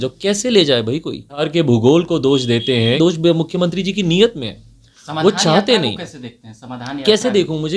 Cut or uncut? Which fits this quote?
cut